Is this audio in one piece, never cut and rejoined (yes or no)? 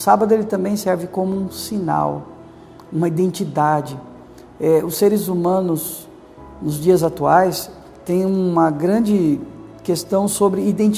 yes